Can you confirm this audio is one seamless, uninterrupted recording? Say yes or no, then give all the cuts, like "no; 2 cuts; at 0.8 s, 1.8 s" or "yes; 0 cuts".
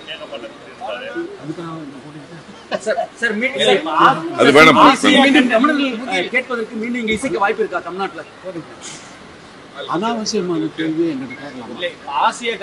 yes; 0 cuts